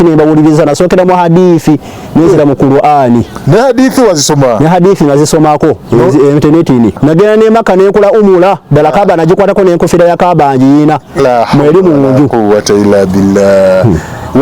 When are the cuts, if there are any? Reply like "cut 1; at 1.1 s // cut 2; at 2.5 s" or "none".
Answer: cut 1; at 7.0 s